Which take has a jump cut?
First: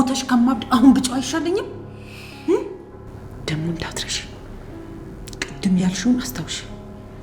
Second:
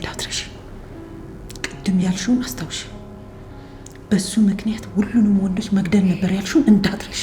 first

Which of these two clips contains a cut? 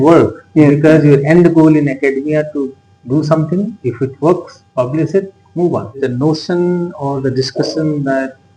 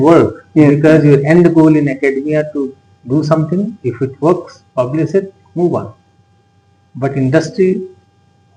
first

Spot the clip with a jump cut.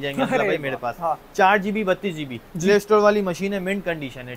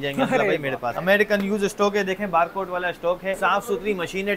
second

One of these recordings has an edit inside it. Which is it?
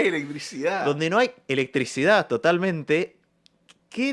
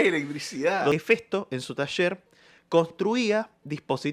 second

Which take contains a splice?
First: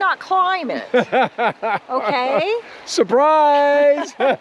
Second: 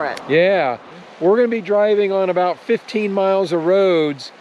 second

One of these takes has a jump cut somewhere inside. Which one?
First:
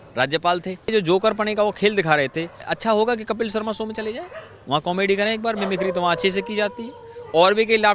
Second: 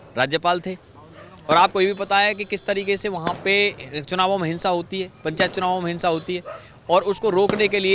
first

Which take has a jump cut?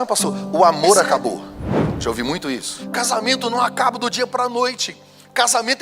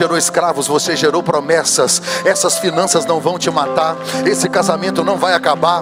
first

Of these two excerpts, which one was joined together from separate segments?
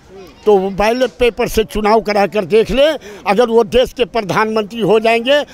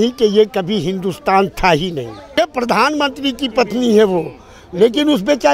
second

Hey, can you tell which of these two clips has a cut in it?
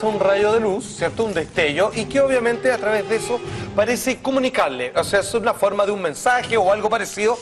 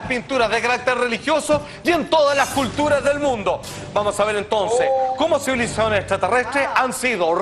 second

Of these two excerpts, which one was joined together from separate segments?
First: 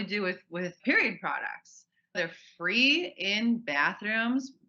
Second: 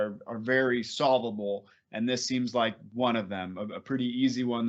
first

